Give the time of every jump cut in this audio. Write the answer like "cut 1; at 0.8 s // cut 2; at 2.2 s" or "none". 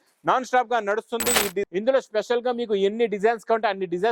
cut 1; at 1.7 s